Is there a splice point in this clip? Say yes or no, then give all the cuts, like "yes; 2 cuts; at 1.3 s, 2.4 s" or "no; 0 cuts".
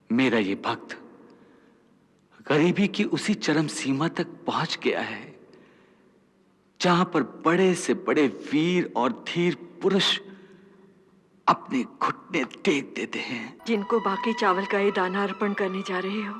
yes; 1 cut; at 13.5 s